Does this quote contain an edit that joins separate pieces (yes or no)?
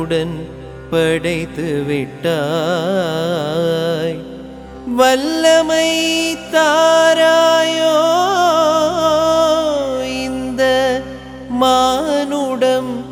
no